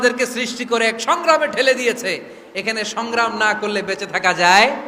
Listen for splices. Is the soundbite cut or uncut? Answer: uncut